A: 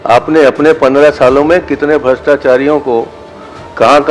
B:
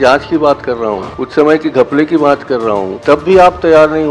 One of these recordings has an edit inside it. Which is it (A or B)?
B